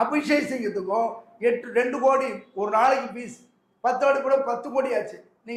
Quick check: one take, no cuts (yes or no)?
yes